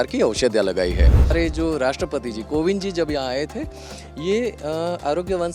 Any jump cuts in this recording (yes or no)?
yes